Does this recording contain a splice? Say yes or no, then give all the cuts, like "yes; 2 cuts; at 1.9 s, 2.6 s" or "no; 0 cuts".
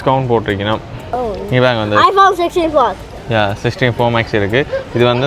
yes; 1 cut; at 1.0 s